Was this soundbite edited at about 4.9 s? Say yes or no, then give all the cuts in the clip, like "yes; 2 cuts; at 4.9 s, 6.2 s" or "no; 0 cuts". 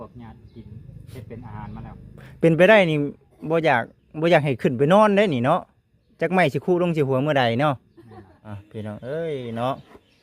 no; 1 cut; at 8.5 s